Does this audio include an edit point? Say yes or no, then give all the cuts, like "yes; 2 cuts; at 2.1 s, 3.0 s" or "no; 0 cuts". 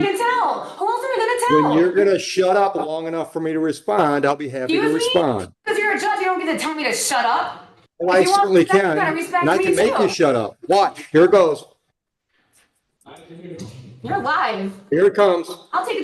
no; 0 cuts